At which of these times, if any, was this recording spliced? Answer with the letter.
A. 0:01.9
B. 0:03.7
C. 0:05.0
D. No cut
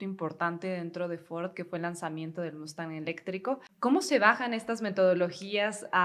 B